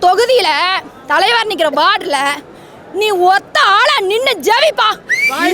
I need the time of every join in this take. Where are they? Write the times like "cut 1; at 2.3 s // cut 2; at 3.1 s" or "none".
none